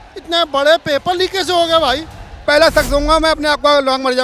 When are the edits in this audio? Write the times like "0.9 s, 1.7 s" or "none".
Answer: 2.4 s